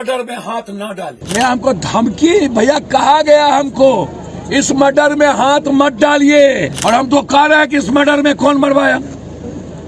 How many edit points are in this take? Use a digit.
2